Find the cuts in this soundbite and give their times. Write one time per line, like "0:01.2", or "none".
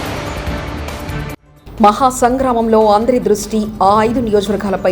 0:01.5